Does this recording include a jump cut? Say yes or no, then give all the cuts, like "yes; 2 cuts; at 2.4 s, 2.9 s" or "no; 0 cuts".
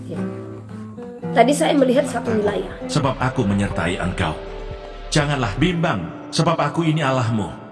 yes; 1 cut; at 2.8 s